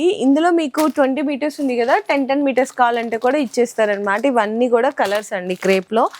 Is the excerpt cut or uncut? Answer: uncut